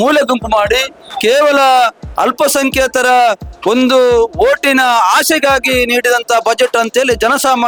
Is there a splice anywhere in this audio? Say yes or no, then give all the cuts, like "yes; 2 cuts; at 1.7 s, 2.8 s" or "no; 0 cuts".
no; 0 cuts